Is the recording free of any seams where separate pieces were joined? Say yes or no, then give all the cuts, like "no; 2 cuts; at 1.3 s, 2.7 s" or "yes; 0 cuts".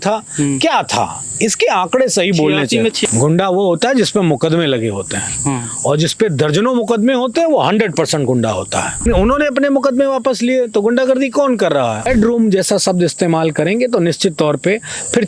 no; 3 cuts; at 3.0 s, 9.1 s, 12.1 s